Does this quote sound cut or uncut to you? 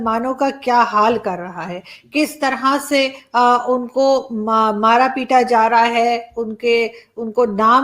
uncut